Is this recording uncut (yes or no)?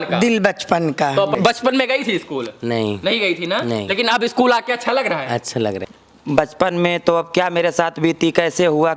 no